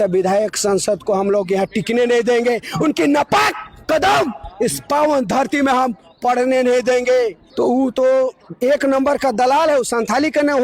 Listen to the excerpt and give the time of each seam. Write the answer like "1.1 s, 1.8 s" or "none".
7.4 s